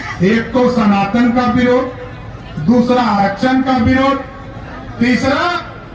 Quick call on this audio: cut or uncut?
uncut